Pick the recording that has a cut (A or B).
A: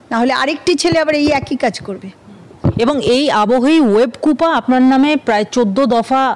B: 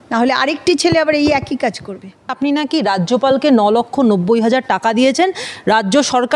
B